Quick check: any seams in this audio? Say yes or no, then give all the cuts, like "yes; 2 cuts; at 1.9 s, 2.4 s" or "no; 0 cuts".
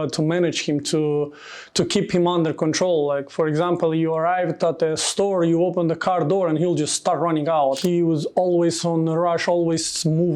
yes; 1 cut; at 7.8 s